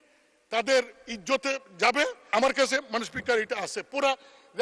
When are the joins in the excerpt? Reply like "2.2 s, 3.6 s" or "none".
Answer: 2.3 s